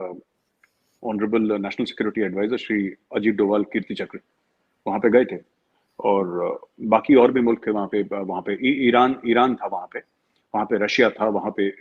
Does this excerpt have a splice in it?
no; 0 cuts

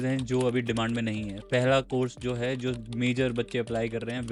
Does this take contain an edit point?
no; 0 cuts

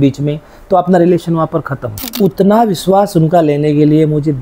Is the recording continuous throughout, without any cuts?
no; 1 cut; at 2.1 s

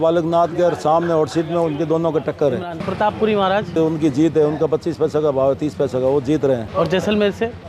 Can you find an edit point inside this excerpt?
yes; 3 cuts; at 2.5 s, 3.8 s, 6.7 s

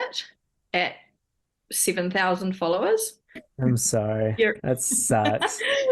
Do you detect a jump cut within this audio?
yes; 1 cut; at 3.4 s

